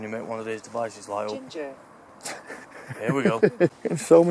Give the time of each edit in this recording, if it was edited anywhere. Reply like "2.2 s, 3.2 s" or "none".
3.4 s